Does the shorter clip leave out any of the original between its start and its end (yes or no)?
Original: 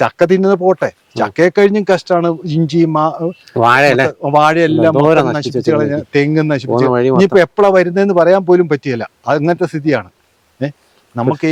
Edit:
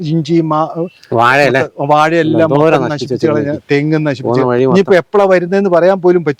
no